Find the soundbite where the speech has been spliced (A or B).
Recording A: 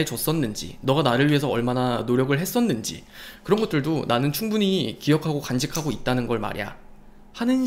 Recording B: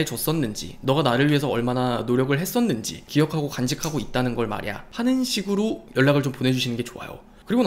B